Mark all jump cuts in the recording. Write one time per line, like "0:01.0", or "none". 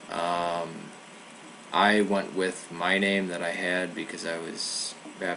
0:02.3